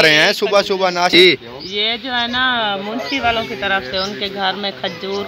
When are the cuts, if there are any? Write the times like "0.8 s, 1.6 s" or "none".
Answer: 1.1 s